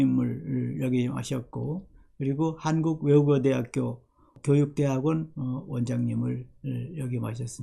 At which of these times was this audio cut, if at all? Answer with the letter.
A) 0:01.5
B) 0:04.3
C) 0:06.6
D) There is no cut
B